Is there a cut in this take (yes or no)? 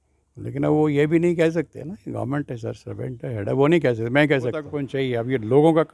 yes